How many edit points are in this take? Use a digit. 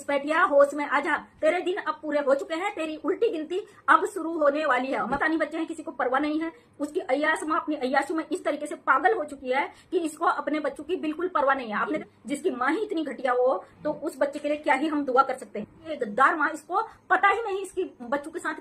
3